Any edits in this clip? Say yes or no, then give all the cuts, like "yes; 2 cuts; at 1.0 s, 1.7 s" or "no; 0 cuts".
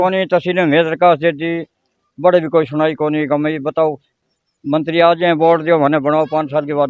no; 0 cuts